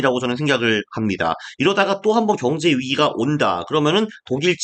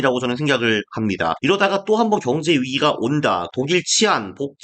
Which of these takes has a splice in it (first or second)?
second